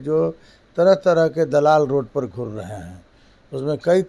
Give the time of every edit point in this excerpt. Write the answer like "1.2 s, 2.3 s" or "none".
none